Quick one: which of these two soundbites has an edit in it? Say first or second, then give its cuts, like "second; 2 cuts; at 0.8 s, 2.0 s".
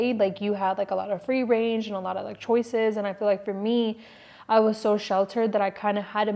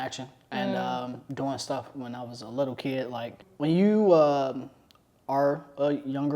second; 1 cut; at 3.5 s